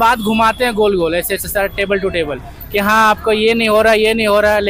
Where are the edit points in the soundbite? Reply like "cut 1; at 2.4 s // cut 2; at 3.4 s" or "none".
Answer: none